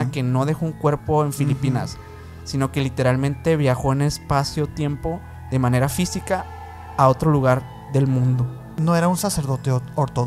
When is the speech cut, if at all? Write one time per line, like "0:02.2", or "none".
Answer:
0:08.7